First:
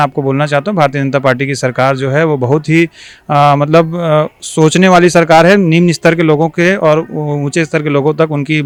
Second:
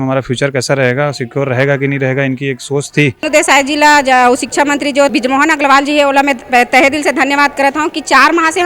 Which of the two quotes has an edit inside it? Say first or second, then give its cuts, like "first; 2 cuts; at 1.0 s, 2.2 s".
second; 2 cuts; at 3.3 s, 5.1 s